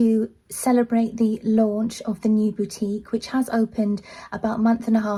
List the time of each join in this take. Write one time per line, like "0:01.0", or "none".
none